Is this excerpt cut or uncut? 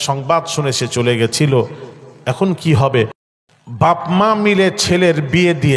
cut